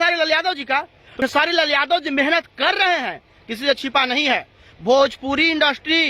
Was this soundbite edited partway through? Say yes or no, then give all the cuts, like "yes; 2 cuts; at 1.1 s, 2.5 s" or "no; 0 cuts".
yes; 1 cut; at 1.0 s